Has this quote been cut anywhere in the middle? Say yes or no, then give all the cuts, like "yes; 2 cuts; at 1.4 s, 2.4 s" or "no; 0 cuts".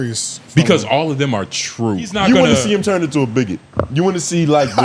yes; 1 cut; at 2.1 s